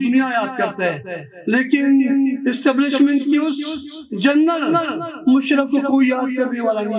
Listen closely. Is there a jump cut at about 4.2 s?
no; 0 cuts

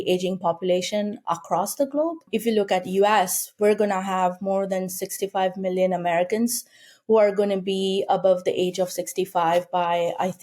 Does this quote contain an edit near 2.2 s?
yes; 1 cut; at 2.2 s

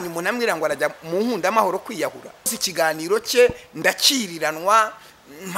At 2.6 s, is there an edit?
yes; 1 cut; at 2.6 s

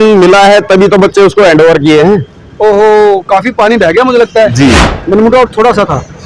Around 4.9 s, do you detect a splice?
yes; 1 cut; at 4.9 s

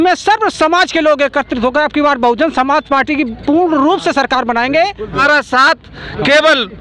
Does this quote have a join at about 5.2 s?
yes; 1 cut; at 5.2 s

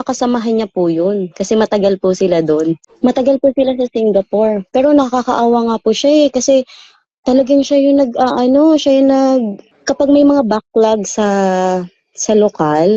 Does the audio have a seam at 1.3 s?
no; 1 cut; at 2.9 s

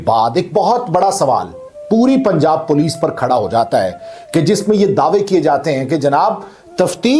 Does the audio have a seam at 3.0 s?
no; 0 cuts

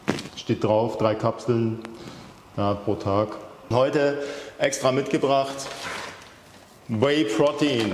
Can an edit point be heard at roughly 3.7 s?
yes; 1 cut; at 3.7 s

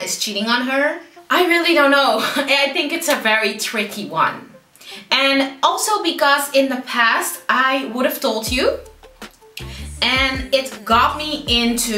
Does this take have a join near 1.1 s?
yes; 1 cut; at 1.1 s

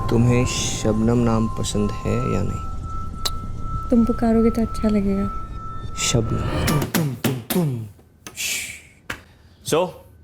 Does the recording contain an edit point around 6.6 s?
yes; 1 cut; at 6.6 s

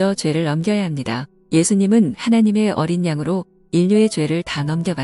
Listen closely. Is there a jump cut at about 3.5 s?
no; 1 cut; at 1.3 s

